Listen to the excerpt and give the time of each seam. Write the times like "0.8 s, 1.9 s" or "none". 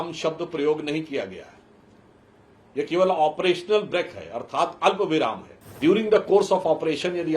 5.8 s